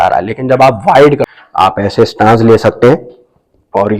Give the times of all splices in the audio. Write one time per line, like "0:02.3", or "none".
0:01.3